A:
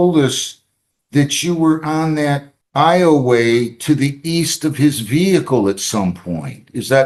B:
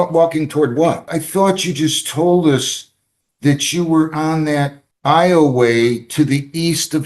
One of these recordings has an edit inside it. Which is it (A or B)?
B